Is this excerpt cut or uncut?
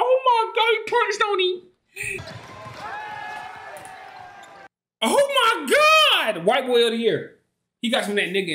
cut